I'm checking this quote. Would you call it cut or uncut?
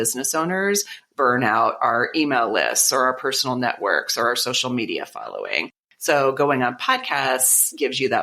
cut